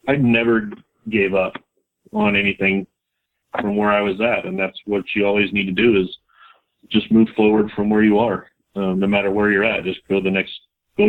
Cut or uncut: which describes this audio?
cut